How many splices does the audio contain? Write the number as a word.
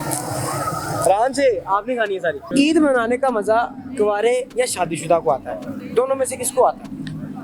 one